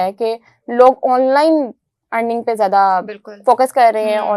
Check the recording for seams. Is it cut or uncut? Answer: uncut